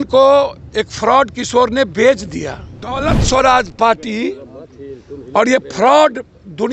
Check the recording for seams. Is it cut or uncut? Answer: cut